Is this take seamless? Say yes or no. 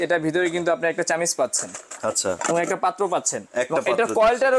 yes